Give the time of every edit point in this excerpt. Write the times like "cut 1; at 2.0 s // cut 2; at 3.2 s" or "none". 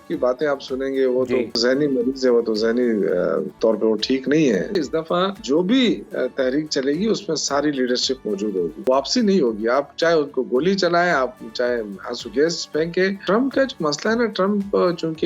cut 1; at 1.6 s // cut 2; at 3.5 s // cut 3; at 4.8 s // cut 4; at 8.8 s // cut 5; at 13.2 s